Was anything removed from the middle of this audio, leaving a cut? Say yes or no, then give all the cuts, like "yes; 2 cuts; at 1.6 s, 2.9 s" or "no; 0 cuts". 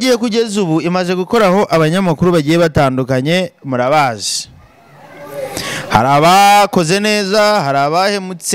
no; 0 cuts